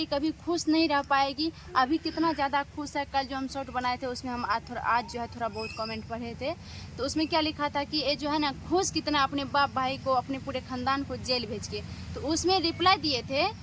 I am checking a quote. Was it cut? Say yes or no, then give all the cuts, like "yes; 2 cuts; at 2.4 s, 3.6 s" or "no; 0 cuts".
no; 0 cuts